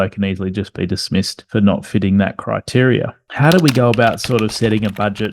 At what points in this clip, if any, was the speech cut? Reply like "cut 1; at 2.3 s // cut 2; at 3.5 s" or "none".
cut 1; at 3.2 s